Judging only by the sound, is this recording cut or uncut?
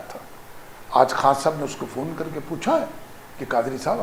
uncut